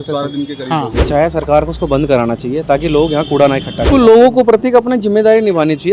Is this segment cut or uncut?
cut